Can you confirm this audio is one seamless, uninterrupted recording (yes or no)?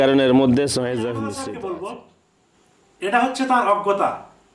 no